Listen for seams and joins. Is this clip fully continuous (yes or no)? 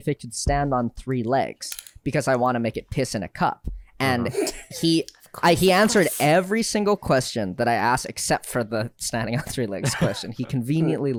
yes